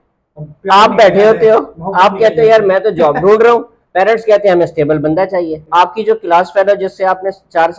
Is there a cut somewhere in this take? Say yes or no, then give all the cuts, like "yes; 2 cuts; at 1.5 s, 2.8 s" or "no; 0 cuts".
yes; 1 cut; at 5.6 s